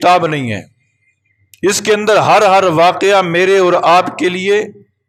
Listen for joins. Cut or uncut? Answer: uncut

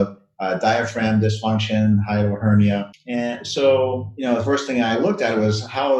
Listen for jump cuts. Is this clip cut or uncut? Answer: cut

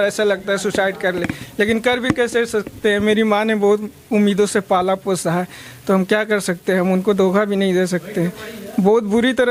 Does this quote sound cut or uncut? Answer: uncut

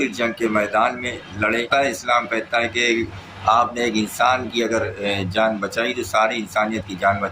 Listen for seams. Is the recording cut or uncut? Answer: cut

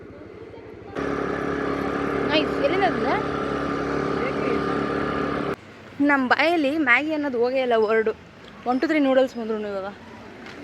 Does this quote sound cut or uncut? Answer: cut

